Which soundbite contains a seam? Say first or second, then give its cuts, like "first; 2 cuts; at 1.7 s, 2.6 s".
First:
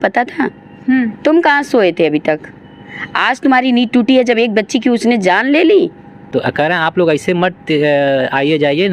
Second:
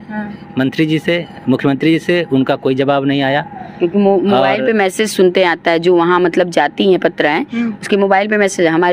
first; 1 cut; at 6.2 s